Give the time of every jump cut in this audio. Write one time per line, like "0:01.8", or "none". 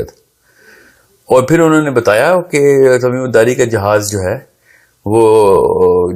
none